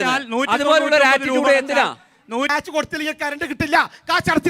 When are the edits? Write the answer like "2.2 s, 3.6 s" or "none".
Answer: 2.4 s